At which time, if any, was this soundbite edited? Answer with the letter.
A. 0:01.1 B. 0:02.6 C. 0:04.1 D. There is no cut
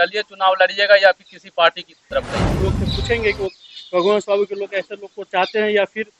B